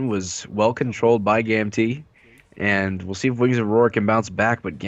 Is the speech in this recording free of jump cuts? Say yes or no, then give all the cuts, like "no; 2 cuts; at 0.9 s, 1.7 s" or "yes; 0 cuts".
yes; 0 cuts